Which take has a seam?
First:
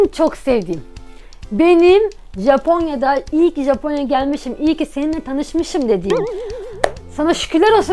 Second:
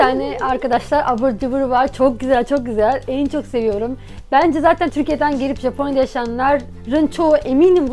second; 1 cut; at 4.9 s

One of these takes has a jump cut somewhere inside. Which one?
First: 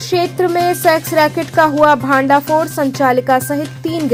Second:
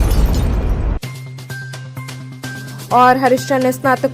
second; 1 cut; at 1.7 s

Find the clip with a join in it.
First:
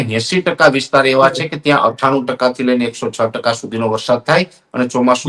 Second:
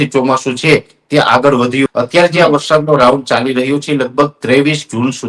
second; 1 cut; at 1.9 s

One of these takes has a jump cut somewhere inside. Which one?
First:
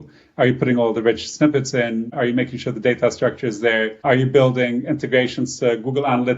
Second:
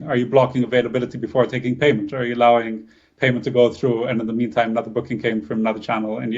first; 2 cuts; at 2.1 s, 4.0 s

